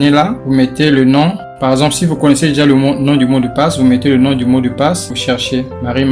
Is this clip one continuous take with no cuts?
yes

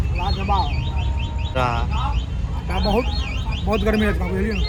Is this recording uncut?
yes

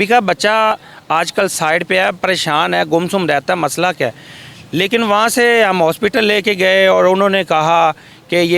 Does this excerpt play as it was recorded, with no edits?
yes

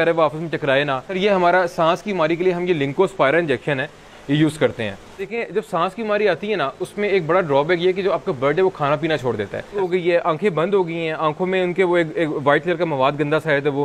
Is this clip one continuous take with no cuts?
no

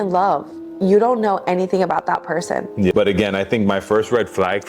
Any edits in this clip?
yes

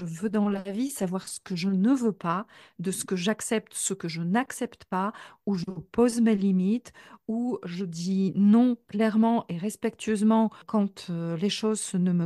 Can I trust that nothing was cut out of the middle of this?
no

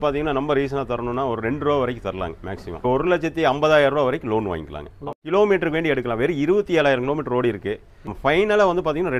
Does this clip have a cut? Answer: yes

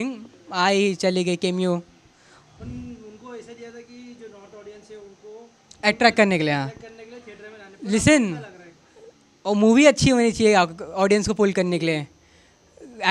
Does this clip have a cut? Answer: no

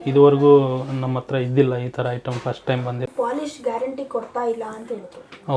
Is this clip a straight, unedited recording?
no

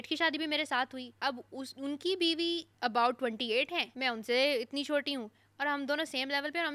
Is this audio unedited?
no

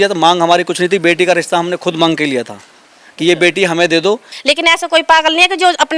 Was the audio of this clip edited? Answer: yes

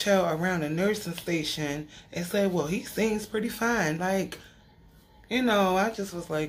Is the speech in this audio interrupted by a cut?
no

